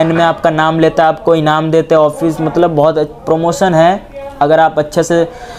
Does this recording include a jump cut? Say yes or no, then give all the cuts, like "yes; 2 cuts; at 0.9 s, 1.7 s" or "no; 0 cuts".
no; 0 cuts